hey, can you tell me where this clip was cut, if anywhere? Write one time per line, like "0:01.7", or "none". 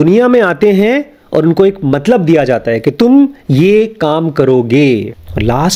none